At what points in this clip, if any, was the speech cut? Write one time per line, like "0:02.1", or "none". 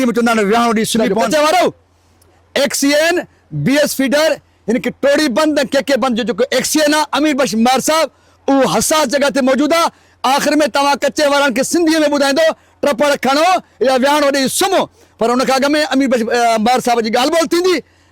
0:01.2